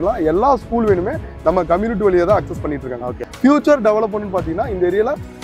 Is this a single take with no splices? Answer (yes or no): no